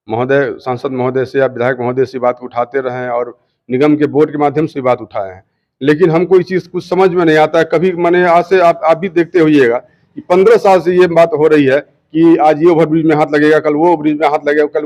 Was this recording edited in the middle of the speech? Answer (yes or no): no